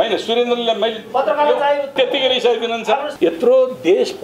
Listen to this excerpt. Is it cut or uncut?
cut